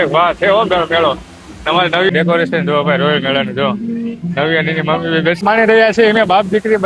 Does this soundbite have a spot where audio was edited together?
yes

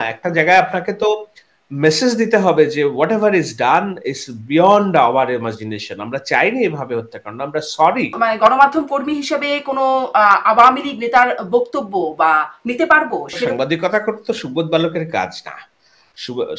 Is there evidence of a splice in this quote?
yes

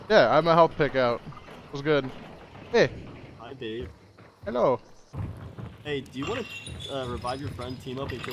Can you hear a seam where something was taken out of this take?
yes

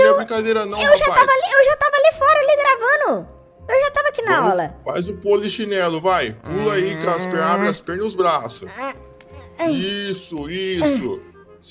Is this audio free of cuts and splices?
yes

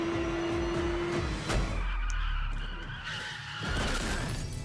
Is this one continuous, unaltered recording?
yes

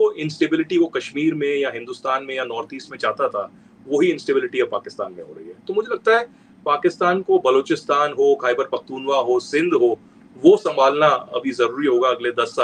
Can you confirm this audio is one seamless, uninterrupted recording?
yes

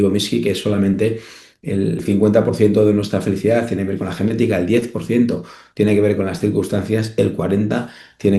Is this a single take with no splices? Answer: no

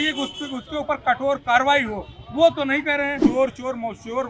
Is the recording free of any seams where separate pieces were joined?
no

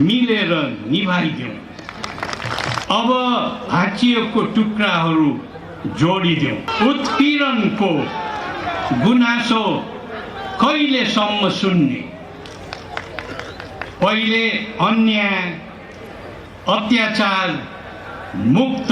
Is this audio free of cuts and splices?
no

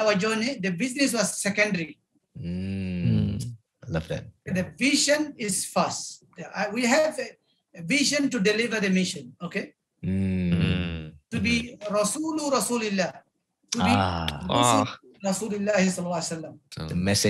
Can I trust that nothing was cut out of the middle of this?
yes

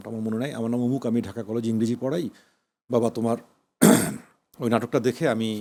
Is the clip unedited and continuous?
yes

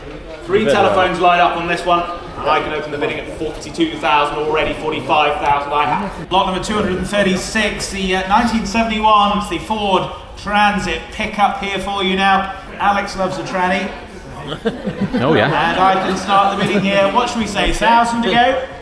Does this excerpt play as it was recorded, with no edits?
no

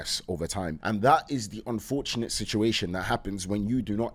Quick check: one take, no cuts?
yes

